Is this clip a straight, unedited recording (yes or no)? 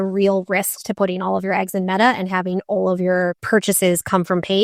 no